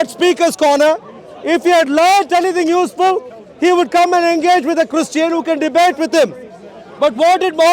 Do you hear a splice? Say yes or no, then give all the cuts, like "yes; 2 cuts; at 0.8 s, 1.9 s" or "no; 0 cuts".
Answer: no; 0 cuts